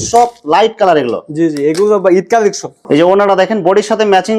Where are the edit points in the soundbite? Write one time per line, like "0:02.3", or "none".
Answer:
0:02.7